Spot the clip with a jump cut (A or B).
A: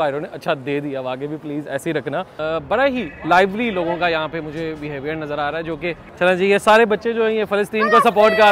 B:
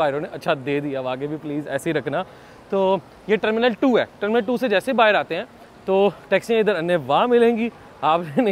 A